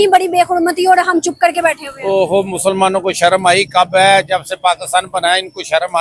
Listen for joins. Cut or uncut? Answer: uncut